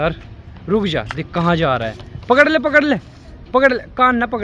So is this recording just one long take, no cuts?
yes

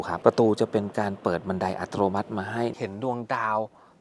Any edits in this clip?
yes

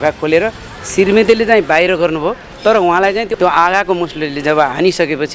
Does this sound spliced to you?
yes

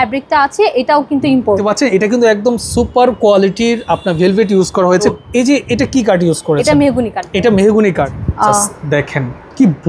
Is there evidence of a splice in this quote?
yes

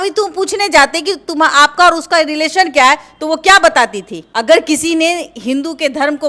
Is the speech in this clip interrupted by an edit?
yes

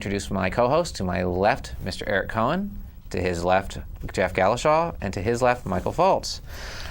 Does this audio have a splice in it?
yes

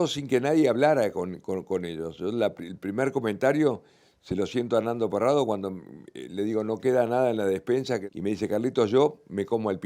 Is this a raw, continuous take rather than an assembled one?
no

